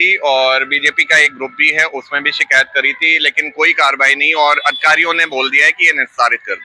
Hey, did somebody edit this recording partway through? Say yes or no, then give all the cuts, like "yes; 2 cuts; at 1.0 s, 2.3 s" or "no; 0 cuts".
no; 0 cuts